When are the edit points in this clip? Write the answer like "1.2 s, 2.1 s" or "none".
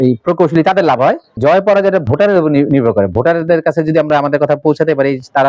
1.4 s

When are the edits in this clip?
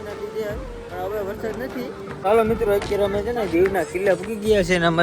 2.2 s

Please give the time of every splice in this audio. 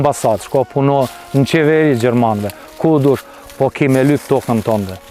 none

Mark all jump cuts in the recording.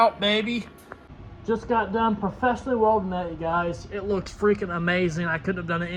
none

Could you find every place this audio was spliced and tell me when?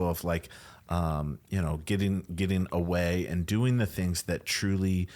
none

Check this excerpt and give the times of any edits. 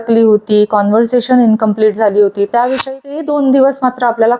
2.9 s

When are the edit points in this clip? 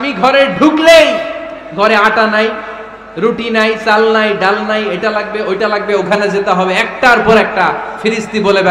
none

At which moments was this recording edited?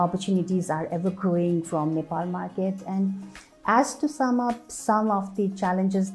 none

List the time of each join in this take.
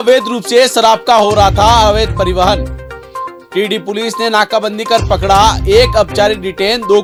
none

